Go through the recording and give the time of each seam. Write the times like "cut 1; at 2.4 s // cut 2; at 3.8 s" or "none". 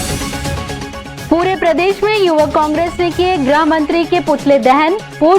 cut 1; at 1.2 s